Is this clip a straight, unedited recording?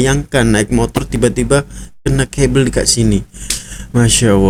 yes; 0 cuts

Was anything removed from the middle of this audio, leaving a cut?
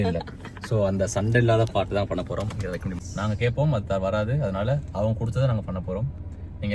yes; 1 cut; at 3.0 s

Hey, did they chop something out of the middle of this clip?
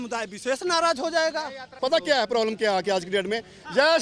yes; 1 cut; at 1.8 s

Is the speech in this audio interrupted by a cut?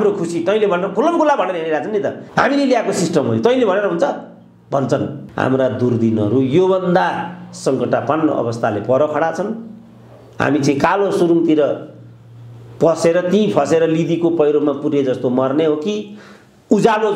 yes; 2 cuts; at 2.2 s, 5.2 s

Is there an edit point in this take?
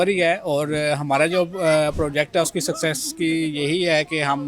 no; 0 cuts

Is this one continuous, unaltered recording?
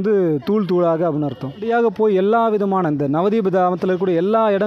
no; 1 cut; at 1.7 s

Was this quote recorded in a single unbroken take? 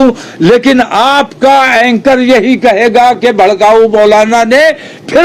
yes; 0 cuts

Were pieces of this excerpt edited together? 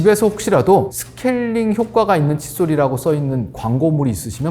yes; 1 cut; at 1.0 s

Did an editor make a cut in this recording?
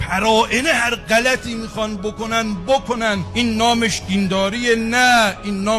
no; 0 cuts

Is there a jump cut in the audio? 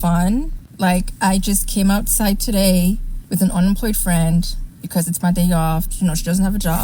no; 0 cuts

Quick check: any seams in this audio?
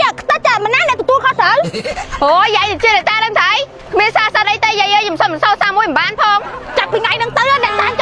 no; 0 cuts

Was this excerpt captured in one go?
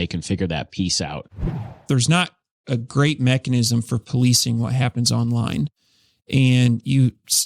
no; 1 cut; at 1.6 s

